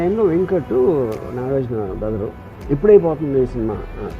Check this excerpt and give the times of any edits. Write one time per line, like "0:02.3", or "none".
0:02.5

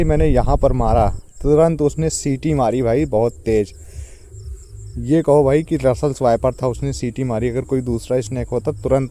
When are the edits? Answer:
none

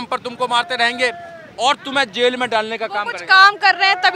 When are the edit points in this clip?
none

